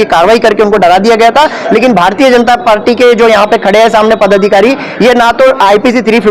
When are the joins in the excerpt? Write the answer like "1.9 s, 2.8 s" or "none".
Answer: none

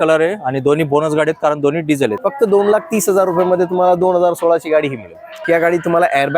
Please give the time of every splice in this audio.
2.2 s, 5.4 s

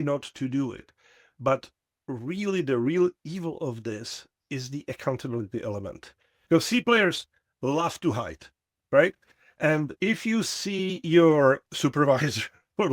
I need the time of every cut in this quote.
6.4 s, 11.6 s

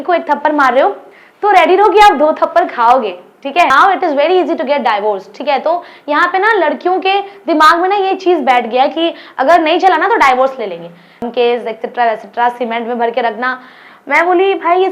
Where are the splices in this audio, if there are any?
3.7 s, 11.3 s

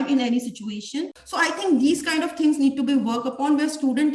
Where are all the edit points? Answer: 1.1 s

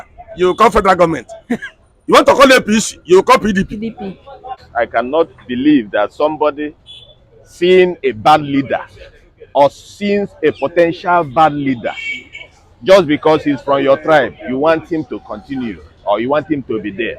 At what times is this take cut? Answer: 4.6 s

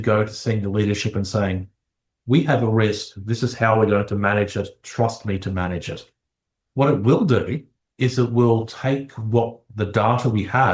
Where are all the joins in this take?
none

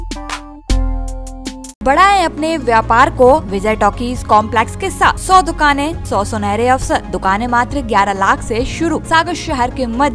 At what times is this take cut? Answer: 1.8 s, 3.5 s, 5.2 s, 6.0 s, 7.1 s, 9.0 s

